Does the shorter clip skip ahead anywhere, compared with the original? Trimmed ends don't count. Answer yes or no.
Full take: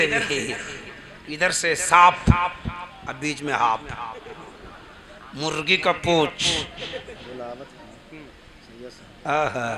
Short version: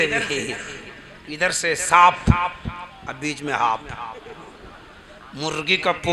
no